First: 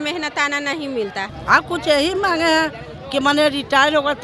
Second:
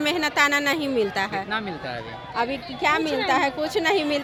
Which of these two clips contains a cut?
first; 1 cut; at 1.3 s

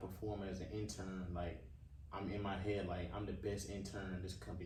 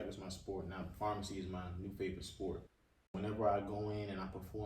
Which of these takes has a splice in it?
second; 1 cut; at 3.1 s

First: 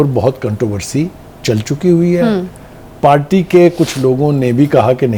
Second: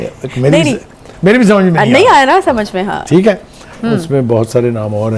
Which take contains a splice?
second; 1 cut; at 3.7 s

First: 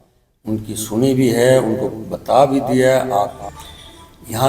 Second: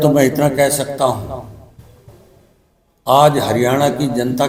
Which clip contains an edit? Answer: first; 1 cut; at 3.4 s

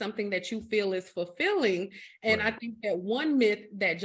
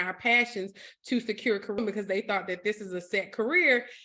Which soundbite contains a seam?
second; 1 cut; at 1.8 s

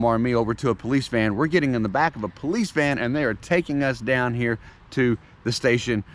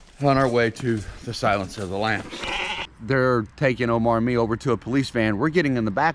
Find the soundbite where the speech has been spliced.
second; 1 cut; at 2.9 s

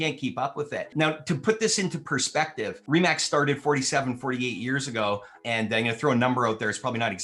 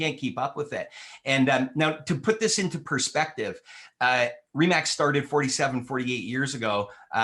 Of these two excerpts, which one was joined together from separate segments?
first; 3 cuts; at 0.9 s, 2.8 s, 5.3 s

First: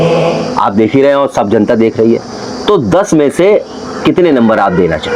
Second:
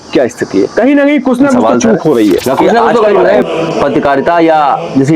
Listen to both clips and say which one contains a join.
second; 1 cut; at 3.2 s

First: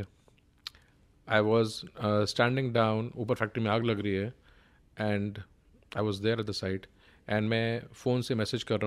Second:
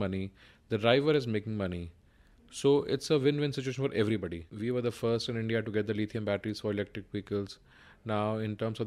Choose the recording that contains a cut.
second; 1 cut; at 4.5 s

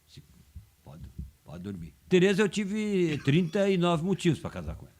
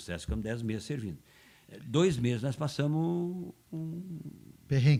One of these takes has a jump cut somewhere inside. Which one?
first; 1 cut; at 2.1 s

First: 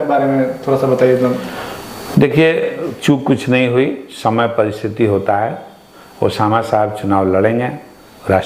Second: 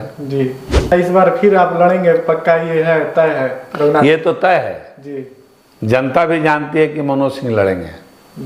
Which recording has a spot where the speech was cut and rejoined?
second; 1 cut; at 0.9 s

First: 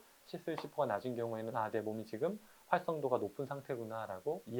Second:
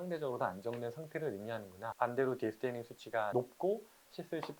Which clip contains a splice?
second; 1 cut; at 1.9 s

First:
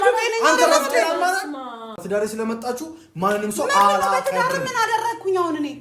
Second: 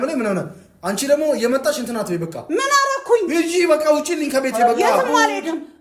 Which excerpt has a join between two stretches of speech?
first; 1 cut; at 2.0 s

